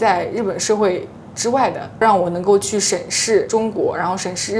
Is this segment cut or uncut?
uncut